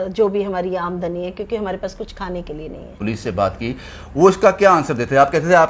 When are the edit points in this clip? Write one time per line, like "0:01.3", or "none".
0:03.0